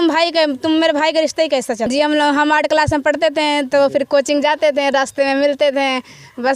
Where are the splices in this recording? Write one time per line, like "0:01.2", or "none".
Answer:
0:01.9